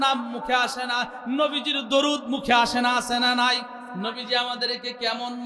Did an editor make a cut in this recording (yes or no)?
yes